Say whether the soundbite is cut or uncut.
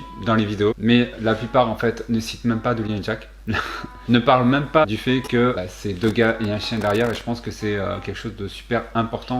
uncut